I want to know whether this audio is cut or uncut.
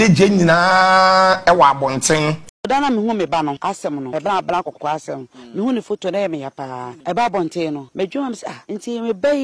cut